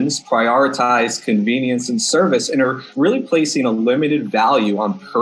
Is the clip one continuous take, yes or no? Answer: no